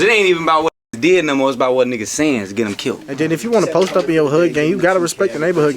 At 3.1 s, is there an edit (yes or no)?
yes